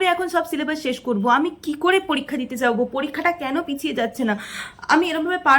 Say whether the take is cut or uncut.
uncut